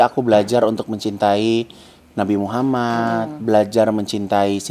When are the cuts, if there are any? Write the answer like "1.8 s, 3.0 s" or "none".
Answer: none